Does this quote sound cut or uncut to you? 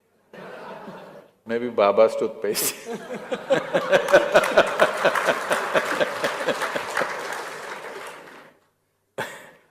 cut